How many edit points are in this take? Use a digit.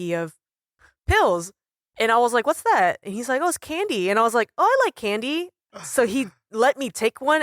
1